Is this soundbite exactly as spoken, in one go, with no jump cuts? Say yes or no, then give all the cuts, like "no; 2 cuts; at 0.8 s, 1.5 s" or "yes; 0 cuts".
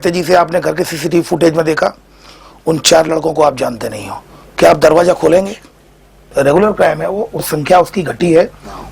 no; 2 cuts; at 6.3 s, 7.5 s